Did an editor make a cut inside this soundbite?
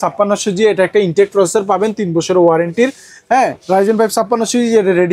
no; 0 cuts

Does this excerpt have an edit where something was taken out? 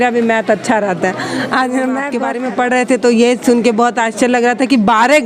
yes; 1 cut; at 2.2 s

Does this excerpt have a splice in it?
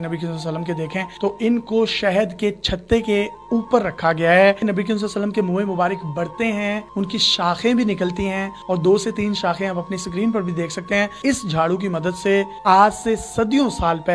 yes; 3 cuts; at 4.6 s, 11.2 s, 12.5 s

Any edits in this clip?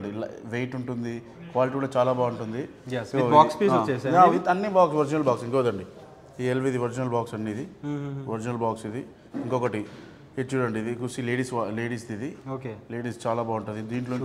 no; 0 cuts

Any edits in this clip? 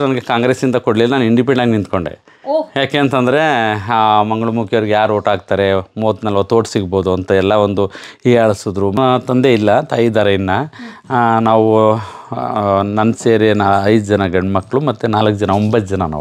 yes; 1 cut; at 9.0 s

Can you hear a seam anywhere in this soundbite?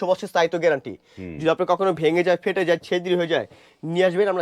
no; 0 cuts

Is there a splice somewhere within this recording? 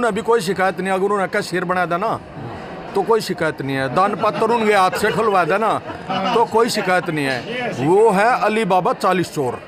no; 0 cuts

